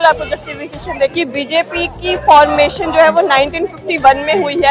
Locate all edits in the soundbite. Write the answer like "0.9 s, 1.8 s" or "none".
1.1 s